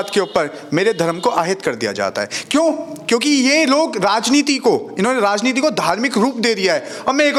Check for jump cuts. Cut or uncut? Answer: uncut